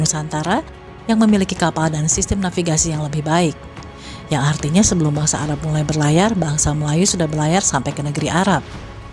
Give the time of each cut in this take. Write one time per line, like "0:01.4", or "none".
none